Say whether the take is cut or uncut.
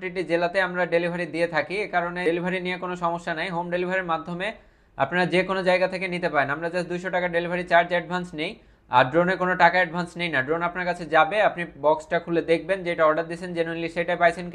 cut